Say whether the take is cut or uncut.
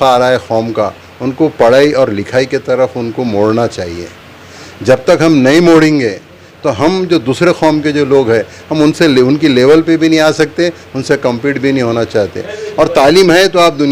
cut